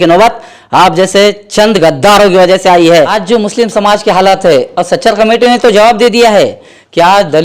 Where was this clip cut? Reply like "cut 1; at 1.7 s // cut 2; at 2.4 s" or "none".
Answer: cut 1; at 3.2 s